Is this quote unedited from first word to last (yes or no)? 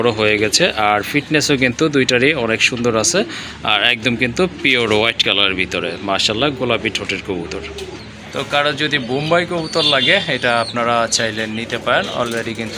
yes